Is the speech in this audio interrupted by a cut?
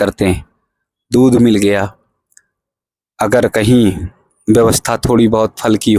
no; 0 cuts

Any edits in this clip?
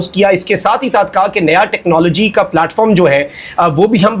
no; 0 cuts

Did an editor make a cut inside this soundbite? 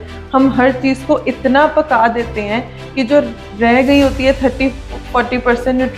no; 0 cuts

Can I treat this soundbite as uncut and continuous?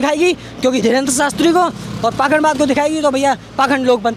yes; 0 cuts

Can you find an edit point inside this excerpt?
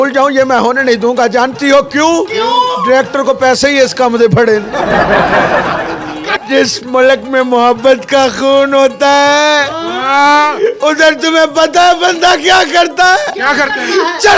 yes; 1 cut; at 6.3 s

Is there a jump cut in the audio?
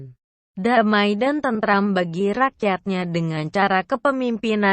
yes; 1 cut; at 3.7 s

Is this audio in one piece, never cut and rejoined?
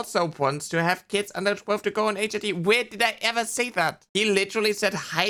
yes; 0 cuts

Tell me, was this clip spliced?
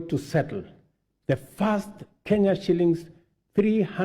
no; 0 cuts

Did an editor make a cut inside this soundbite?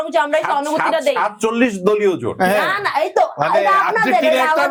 no; 0 cuts

